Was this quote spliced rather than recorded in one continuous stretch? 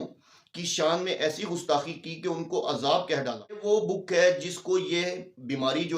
yes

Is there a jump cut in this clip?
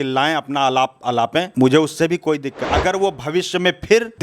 yes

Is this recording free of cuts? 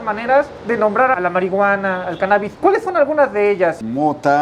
yes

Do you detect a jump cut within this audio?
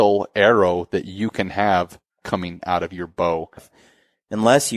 yes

